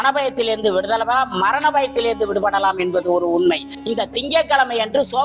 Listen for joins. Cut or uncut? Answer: cut